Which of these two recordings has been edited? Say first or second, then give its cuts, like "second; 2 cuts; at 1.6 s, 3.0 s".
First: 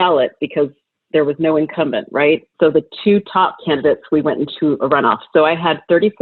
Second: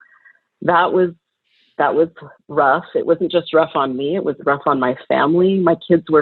first; 2 cuts; at 2.5 s, 3.6 s